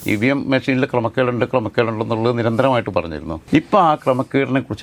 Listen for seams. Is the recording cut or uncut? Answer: uncut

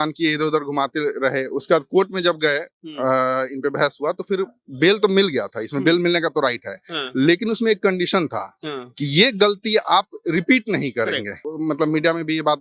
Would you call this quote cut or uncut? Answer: cut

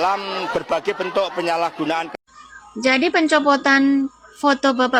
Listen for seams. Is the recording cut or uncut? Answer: uncut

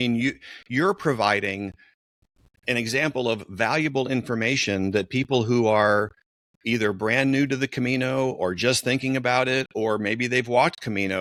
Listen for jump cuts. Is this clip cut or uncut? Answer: uncut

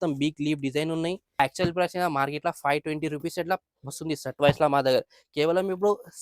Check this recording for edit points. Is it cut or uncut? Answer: cut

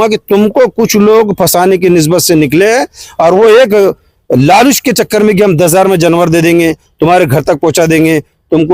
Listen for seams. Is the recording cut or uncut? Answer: uncut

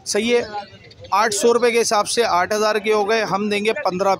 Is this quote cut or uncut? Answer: uncut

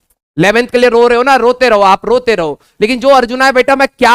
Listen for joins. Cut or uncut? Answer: uncut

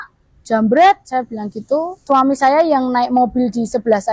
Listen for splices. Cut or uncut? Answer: cut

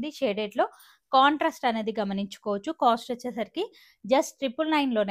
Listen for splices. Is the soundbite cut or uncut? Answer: uncut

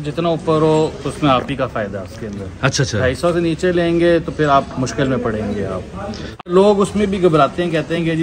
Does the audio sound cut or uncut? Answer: cut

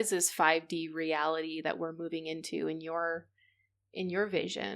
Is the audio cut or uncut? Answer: uncut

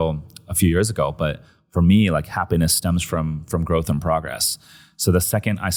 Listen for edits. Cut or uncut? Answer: uncut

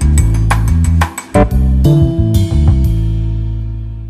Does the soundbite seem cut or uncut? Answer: uncut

